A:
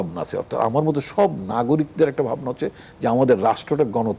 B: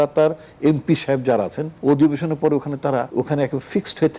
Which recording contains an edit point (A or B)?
B